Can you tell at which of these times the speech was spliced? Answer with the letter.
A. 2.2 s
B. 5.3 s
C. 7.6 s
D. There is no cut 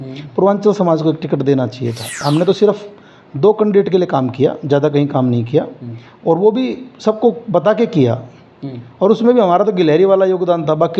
A